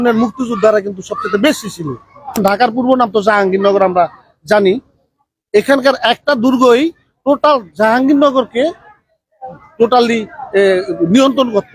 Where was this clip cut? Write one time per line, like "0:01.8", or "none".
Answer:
0:02.4